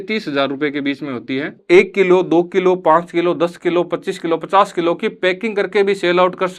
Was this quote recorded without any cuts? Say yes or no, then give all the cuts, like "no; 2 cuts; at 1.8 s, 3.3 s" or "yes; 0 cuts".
no; 1 cut; at 1.6 s